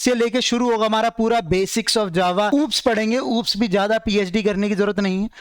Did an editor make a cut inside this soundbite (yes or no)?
yes